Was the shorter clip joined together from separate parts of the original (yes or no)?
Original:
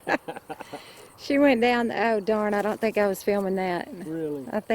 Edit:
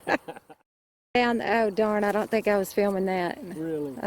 yes